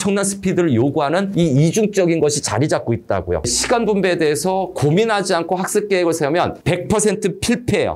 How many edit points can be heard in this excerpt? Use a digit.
1